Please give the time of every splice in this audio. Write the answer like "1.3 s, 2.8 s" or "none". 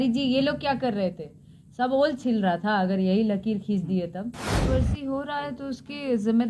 4.6 s